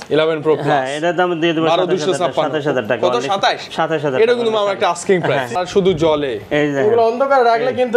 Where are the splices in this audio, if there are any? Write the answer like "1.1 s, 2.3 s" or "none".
5.6 s